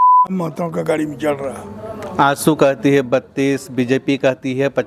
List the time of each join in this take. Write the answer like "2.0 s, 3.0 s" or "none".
none